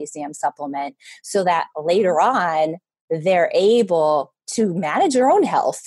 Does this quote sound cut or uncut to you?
cut